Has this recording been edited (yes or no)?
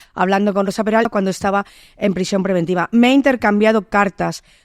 yes